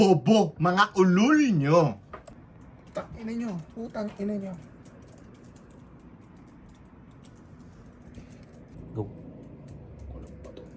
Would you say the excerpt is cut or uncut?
uncut